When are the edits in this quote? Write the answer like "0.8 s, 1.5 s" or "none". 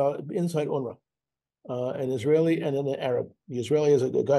none